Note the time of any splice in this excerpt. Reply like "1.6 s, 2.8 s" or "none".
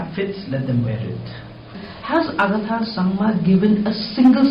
1.7 s